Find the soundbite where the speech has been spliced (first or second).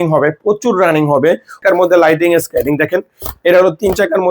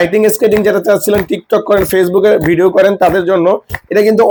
first